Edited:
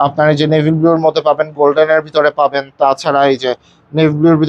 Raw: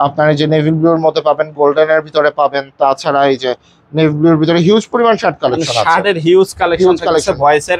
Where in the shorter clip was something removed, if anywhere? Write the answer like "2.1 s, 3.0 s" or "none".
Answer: none